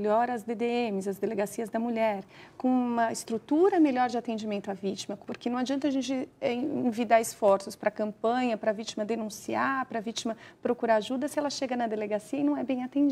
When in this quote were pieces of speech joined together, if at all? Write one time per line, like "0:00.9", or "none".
0:05.2

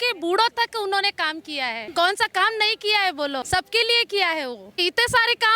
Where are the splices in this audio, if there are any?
0:01.8
0:03.4
0:04.8

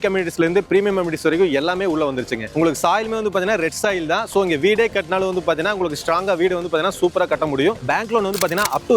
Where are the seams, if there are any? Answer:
0:02.5
0:07.8

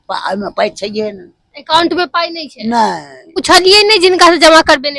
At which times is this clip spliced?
0:03.4

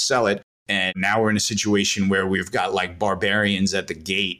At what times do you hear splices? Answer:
0:00.9

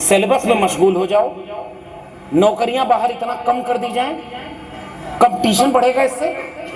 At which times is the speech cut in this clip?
none

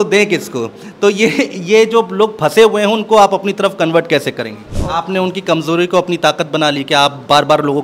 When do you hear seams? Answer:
0:04.6

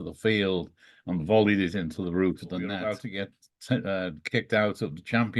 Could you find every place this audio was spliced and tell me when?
0:03.0

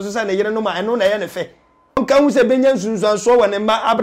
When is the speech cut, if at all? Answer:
0:02.0

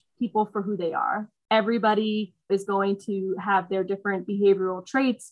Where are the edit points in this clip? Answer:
0:01.3
0:02.5

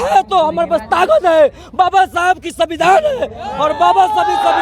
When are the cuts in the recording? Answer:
none

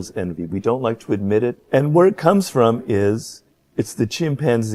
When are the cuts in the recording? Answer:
none

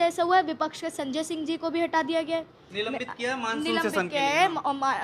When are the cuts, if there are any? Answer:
none

